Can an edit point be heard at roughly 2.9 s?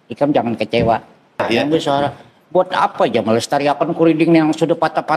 no; 1 cut; at 1.4 s

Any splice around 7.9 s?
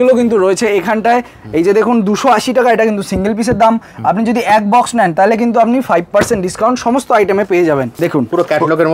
yes; 1 cut; at 7.9 s

